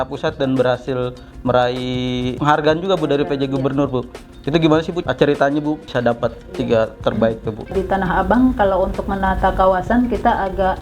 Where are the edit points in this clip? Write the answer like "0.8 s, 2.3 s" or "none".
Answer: 2.3 s, 5.0 s, 5.9 s, 7.7 s